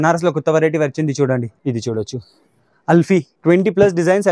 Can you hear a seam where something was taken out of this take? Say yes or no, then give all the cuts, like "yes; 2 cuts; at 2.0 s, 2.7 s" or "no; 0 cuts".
yes; 2 cuts; at 1.5 s, 3.3 s